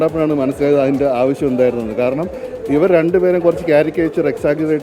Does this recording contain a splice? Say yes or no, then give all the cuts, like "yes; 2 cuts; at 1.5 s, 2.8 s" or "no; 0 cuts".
no; 0 cuts